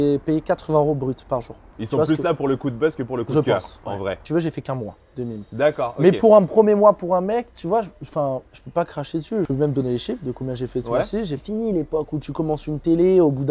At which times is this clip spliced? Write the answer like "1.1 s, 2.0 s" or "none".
1.7 s, 4.2 s, 9.5 s, 11.3 s